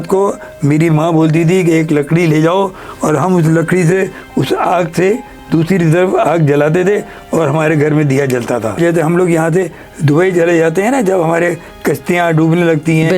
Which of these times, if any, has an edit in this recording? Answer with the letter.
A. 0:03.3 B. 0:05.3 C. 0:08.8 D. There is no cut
C